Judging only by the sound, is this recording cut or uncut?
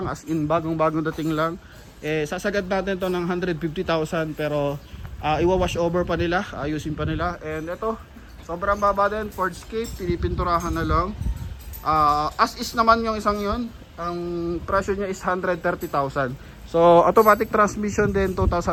uncut